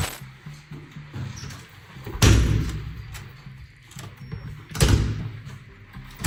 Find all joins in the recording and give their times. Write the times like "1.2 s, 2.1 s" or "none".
none

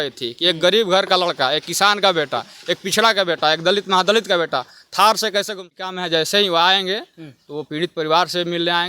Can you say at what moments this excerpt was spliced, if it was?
5.9 s

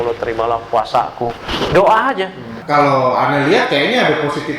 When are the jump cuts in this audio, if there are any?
2.5 s

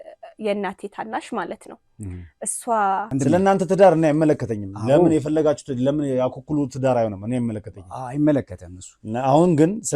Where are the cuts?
3.1 s

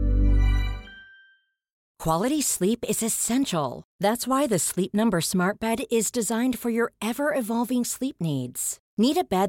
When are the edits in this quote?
1.9 s

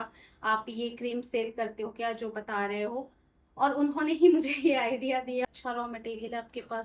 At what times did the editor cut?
5.5 s

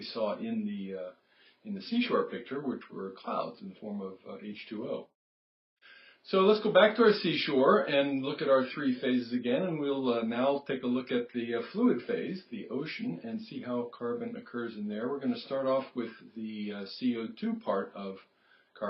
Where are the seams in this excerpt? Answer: 10.7 s

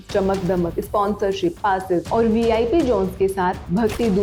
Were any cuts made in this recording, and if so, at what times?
none

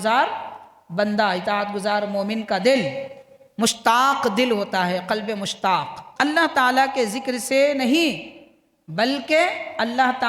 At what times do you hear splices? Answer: 6.0 s

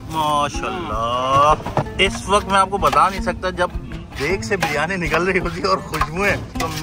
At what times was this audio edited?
none

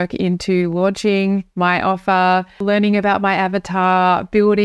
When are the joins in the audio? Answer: 2.6 s

